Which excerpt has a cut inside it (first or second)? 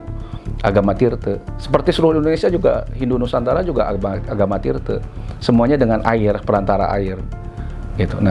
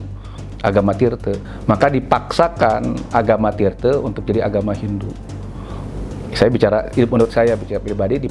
second